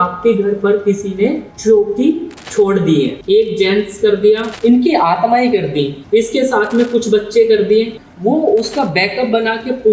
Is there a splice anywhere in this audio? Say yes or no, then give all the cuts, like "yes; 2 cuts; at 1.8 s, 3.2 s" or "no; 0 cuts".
yes; 6 cuts; at 1.5 s, 2.3 s, 3.2 s, 4.5 s, 6.0 s, 8.0 s